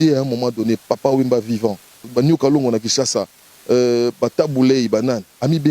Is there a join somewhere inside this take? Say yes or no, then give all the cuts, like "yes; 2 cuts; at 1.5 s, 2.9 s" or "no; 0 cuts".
yes; 1 cut; at 2.1 s